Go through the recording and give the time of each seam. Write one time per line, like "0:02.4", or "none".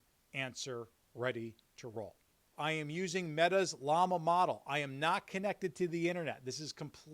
0:02.5